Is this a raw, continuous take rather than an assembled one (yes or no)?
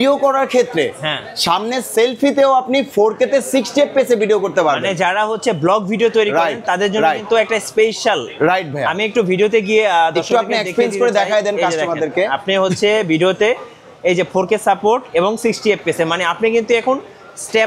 yes